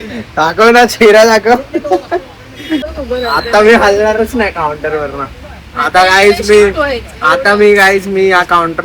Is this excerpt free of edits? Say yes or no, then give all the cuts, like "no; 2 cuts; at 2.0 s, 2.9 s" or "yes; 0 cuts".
no; 1 cut; at 3.0 s